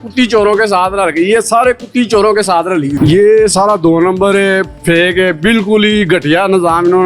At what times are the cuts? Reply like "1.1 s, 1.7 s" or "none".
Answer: 2.9 s